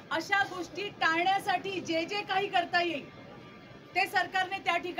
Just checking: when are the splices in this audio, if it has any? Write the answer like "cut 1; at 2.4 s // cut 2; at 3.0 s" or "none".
none